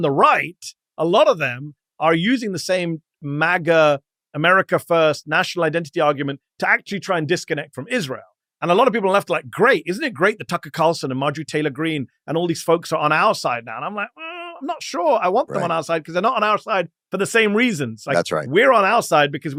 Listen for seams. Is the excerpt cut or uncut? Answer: uncut